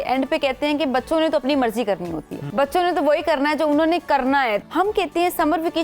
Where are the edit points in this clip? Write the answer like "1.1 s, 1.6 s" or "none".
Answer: 2.4 s, 4.6 s